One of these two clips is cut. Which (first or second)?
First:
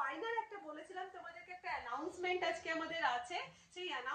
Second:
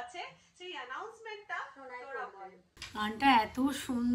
second